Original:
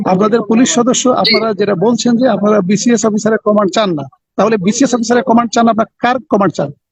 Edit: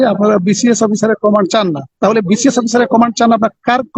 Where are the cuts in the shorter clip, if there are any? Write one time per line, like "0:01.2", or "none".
0:01.8